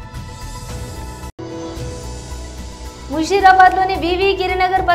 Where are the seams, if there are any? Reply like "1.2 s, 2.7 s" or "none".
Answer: none